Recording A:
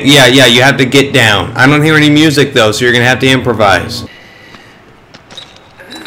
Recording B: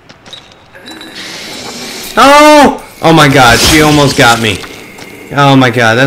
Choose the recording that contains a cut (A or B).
A